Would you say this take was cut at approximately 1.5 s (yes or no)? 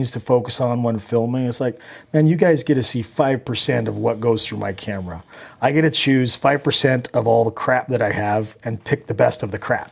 no